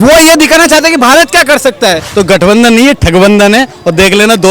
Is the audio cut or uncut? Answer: cut